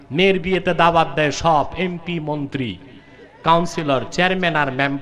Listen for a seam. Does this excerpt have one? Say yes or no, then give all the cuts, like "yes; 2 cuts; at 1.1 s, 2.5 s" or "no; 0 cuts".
no; 0 cuts